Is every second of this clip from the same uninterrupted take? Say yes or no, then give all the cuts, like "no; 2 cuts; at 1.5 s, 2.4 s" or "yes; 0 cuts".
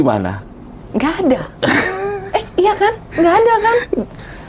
yes; 0 cuts